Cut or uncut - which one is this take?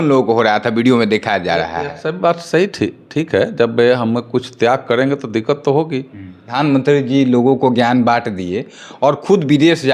cut